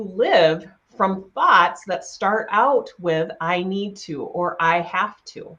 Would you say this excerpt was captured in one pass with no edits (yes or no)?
yes